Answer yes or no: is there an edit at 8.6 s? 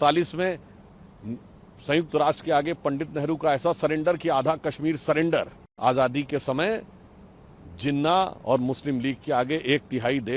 no